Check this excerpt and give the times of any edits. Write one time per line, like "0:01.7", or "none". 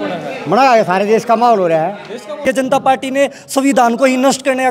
0:02.4